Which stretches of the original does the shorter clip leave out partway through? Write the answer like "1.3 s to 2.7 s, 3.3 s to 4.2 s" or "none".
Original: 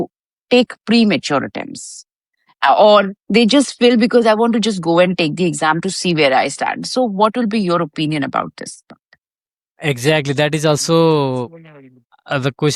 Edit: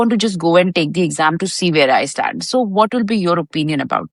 none